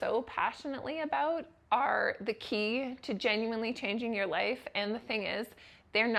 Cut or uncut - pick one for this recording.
uncut